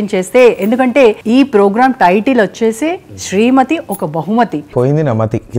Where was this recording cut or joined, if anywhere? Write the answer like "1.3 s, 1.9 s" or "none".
1.2 s, 4.6 s